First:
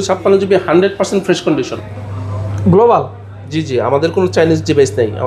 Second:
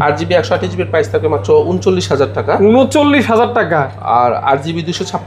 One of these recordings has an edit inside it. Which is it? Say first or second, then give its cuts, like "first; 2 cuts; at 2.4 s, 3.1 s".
first; 1 cut; at 1.8 s